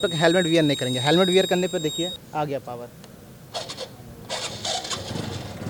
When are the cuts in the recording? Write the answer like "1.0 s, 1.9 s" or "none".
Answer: 2.2 s